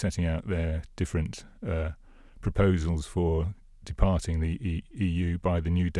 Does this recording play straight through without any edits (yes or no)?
yes